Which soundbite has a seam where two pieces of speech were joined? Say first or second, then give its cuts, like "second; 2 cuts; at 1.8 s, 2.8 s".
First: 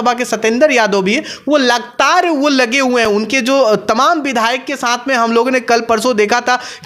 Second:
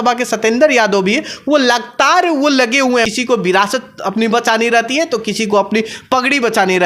second; 1 cut; at 3.0 s